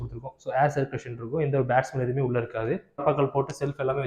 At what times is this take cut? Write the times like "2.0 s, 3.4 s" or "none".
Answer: 3.0 s